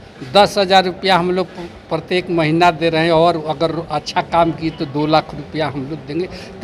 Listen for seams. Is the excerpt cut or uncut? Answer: uncut